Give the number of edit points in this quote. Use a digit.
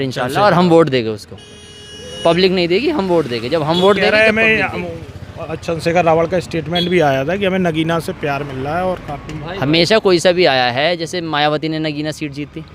0